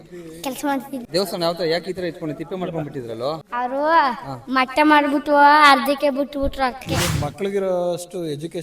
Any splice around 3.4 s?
yes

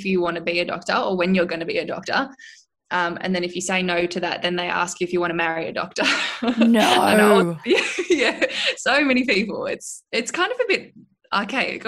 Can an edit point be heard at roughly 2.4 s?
no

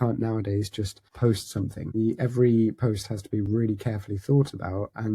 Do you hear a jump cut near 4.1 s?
no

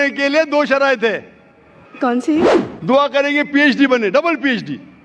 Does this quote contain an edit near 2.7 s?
yes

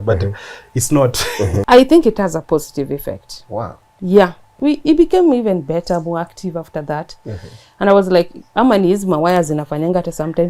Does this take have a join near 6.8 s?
no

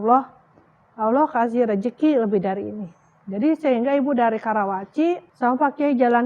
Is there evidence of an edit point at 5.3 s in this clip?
yes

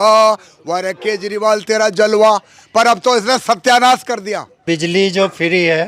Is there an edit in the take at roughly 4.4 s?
no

